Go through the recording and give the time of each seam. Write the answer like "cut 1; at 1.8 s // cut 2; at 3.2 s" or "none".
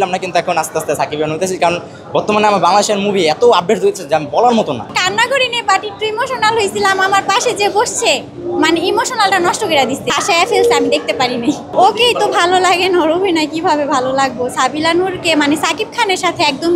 cut 1; at 4.9 s // cut 2; at 10.1 s // cut 3; at 11.6 s

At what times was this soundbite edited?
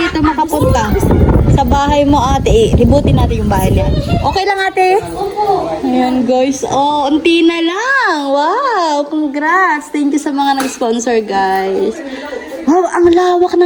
none

